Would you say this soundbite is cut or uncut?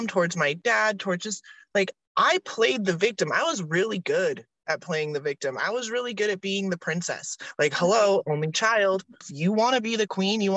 cut